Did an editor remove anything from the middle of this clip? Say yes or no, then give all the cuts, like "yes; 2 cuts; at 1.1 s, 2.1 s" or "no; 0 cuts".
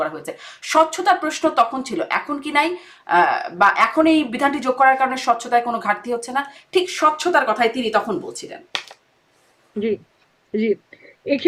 no; 0 cuts